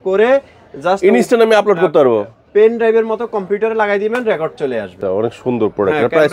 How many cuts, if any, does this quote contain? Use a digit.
1